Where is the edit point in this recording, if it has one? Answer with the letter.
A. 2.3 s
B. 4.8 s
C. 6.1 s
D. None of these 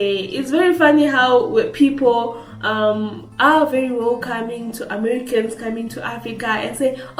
D